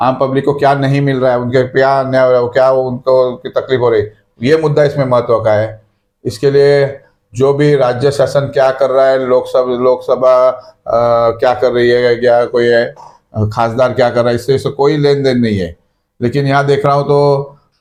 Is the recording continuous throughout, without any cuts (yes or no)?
yes